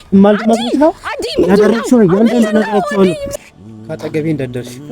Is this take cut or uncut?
cut